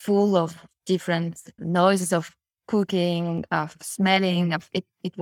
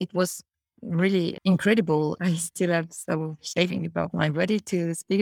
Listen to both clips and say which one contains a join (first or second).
second